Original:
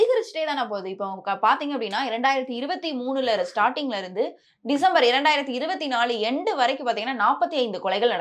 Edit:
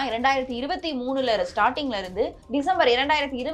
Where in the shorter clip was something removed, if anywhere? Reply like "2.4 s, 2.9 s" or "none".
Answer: 2.4 s